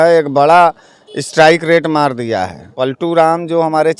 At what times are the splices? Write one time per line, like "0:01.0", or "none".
0:03.0